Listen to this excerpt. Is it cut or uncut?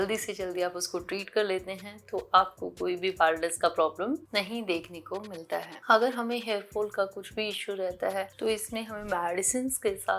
uncut